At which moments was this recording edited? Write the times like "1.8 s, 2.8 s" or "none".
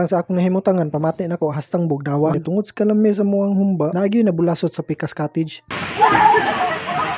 2.3 s